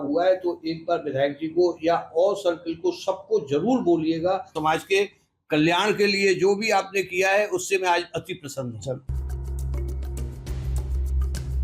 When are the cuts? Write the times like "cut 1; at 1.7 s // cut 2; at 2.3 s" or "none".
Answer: cut 1; at 4.6 s // cut 2; at 9.1 s